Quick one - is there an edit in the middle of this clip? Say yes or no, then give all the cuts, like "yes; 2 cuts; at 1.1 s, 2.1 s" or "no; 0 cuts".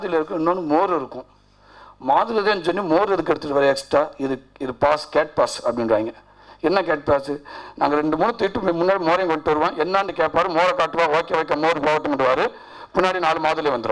no; 0 cuts